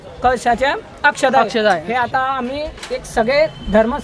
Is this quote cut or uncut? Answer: uncut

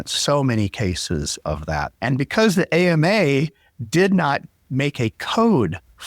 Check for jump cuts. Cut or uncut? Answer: cut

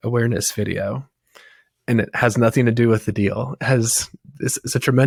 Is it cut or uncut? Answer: uncut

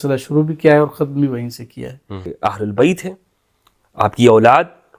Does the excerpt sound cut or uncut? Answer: cut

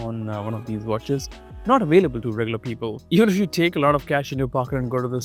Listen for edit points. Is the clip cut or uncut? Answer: uncut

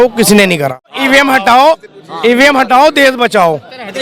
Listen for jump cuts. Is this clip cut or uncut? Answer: cut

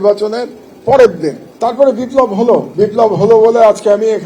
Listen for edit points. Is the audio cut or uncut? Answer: cut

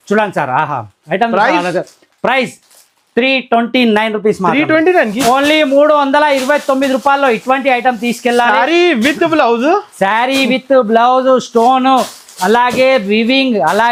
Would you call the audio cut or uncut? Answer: uncut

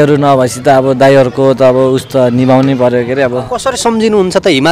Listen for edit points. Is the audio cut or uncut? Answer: cut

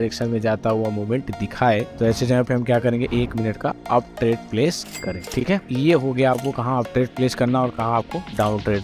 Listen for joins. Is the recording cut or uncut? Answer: cut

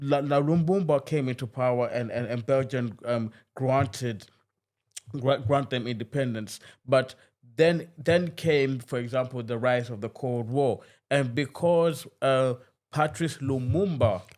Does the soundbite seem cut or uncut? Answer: uncut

